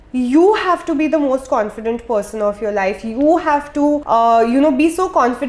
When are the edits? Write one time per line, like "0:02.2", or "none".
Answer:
0:04.0